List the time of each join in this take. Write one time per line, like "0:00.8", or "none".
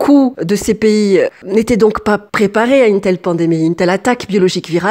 none